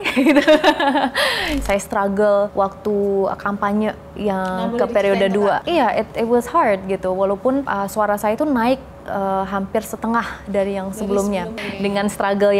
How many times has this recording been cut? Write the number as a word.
five